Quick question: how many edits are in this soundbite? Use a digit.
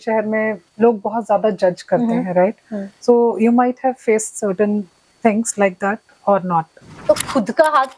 1